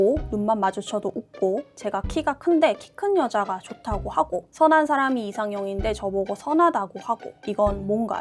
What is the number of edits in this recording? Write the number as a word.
one